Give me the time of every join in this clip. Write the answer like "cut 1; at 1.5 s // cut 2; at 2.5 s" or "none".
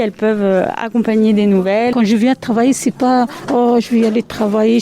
cut 1; at 1.9 s